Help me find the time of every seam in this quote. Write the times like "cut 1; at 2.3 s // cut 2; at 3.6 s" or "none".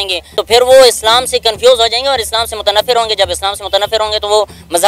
none